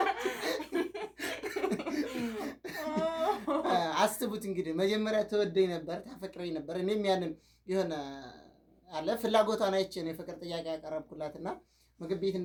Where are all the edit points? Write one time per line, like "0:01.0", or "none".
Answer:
none